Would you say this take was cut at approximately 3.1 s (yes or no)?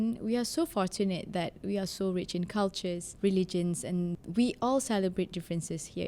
yes